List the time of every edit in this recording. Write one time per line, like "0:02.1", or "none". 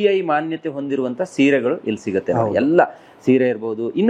none